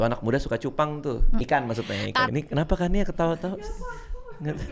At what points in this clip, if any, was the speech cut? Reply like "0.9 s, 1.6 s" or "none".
2.3 s